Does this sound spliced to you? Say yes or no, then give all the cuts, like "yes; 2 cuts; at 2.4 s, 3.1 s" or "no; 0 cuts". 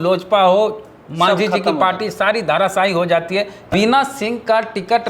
yes; 1 cut; at 3.7 s